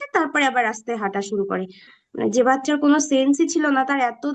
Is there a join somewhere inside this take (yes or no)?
yes